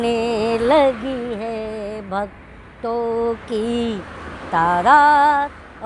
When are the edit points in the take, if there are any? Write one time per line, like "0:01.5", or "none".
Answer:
none